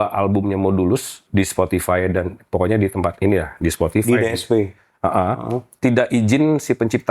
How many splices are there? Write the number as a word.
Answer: two